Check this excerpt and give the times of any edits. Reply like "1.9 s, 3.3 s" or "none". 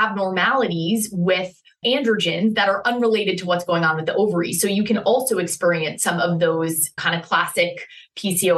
7.0 s